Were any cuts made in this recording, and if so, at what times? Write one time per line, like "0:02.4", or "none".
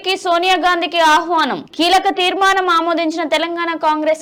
none

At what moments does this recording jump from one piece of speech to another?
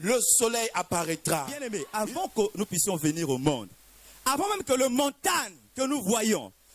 0:01.8

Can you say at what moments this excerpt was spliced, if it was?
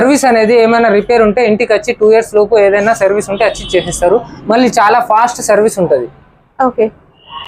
none

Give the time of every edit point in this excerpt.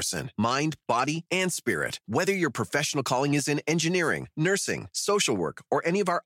none

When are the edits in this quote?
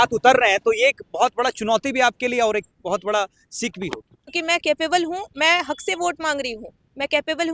0:04.2

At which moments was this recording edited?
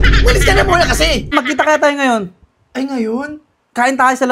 0:01.3

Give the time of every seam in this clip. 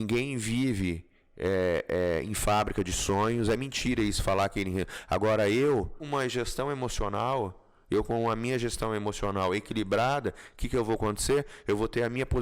0:06.0

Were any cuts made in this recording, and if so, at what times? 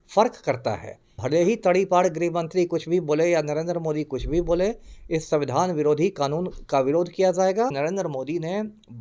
0:01.2
0:07.8

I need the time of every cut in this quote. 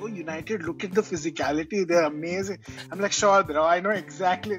none

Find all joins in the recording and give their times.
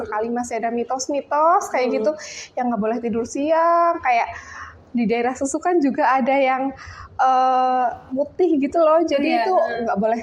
none

